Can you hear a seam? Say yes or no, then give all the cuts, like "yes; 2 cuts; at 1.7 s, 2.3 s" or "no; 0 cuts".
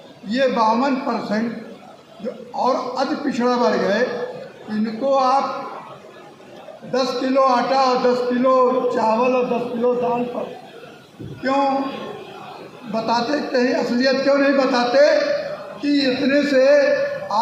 no; 0 cuts